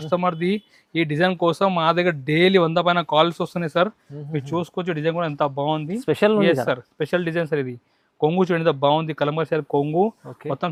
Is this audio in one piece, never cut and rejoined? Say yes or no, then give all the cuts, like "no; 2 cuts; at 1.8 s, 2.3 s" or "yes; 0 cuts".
yes; 0 cuts